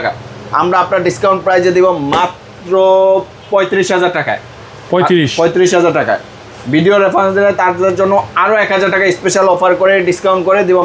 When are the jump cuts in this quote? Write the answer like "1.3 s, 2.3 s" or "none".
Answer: none